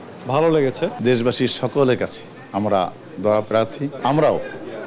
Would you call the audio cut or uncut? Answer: cut